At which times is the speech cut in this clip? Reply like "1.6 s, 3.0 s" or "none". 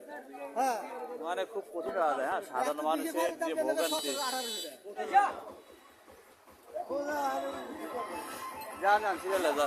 5.0 s

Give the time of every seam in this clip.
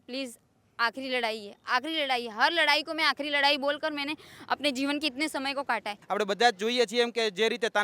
6.0 s

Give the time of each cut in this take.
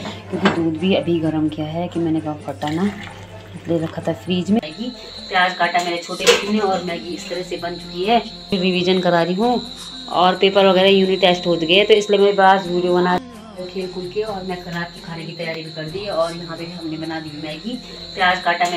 4.6 s, 8.5 s, 13.2 s

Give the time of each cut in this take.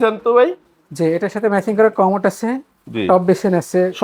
none

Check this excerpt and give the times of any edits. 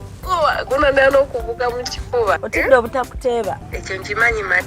2.5 s, 3.7 s

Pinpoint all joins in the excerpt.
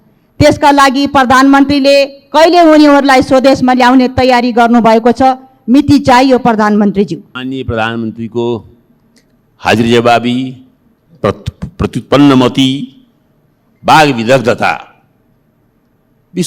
7.3 s

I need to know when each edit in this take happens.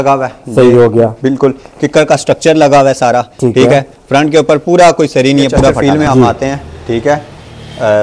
5.8 s

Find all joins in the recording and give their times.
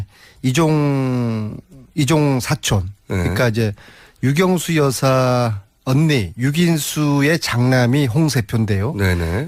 none

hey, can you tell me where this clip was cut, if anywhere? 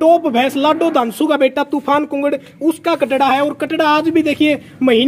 none

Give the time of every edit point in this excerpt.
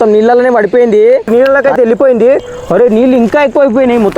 1.3 s

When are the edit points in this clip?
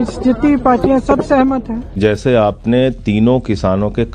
2.0 s

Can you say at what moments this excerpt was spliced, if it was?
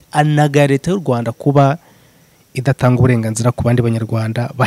none

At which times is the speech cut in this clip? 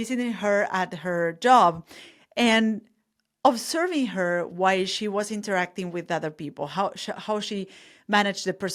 none

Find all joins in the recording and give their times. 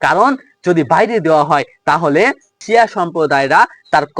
2.6 s

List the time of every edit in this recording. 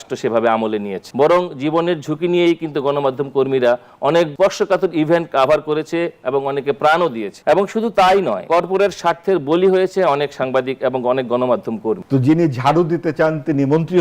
1.0 s, 4.3 s, 7.3 s, 8.4 s, 12.0 s

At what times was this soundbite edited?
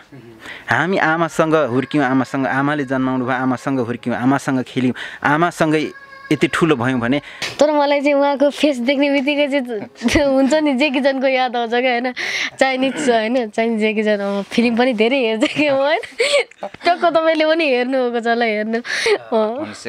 7.4 s, 19.0 s

